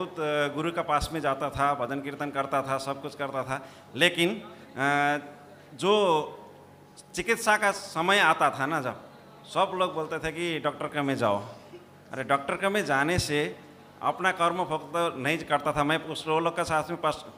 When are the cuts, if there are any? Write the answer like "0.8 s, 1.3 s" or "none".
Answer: none